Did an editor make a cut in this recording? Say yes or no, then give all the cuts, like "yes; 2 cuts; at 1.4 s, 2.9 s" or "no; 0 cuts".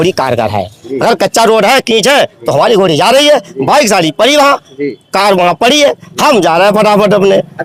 no; 0 cuts